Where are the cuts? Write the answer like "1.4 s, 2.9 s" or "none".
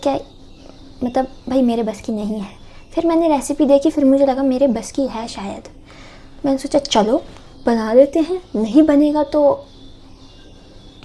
none